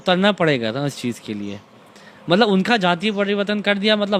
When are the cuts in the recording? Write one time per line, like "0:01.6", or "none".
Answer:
none